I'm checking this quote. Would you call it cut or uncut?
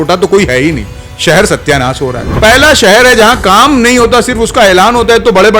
cut